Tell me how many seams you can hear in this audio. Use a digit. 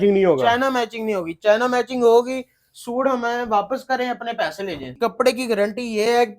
1